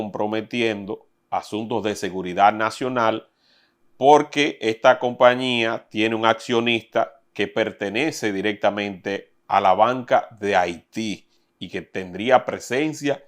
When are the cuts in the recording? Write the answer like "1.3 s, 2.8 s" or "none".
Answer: none